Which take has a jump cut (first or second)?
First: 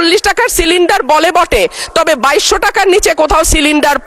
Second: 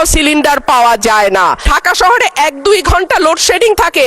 second